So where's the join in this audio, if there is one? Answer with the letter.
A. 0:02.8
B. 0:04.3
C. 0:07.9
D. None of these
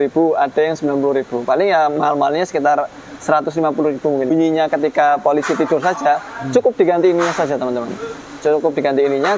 B